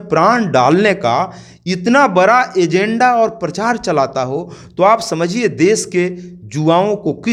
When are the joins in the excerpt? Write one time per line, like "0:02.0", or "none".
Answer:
none